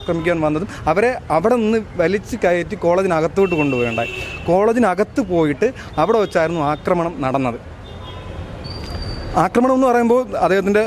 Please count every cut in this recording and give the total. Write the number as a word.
zero